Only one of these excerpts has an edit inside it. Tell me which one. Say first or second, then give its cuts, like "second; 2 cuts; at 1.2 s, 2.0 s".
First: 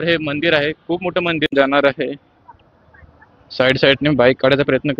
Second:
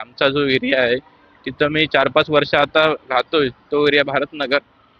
first; 1 cut; at 1.5 s